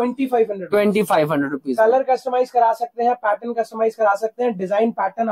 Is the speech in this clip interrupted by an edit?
no; 0 cuts

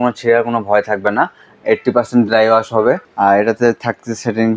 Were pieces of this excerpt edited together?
yes; 1 cut; at 3.1 s

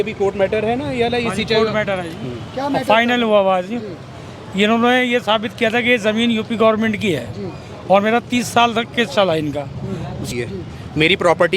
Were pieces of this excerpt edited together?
yes; 1 cut; at 10.3 s

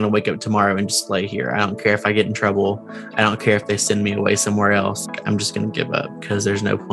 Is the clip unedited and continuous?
no; 1 cut; at 5.1 s

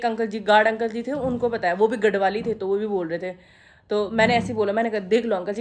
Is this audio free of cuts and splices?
yes; 0 cuts

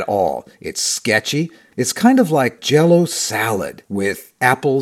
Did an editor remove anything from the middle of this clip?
yes; 1 cut; at 1.7 s

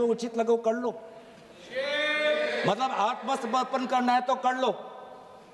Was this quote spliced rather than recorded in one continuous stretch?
no; 0 cuts

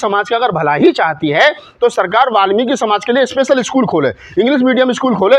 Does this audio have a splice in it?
no; 0 cuts

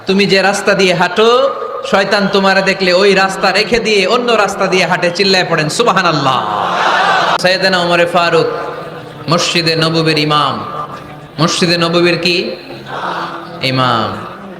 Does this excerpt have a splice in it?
yes; 1 cut; at 7.4 s

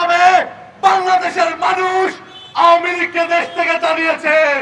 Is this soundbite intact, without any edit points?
yes; 0 cuts

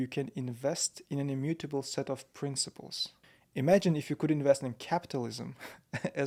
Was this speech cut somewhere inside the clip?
no; 0 cuts

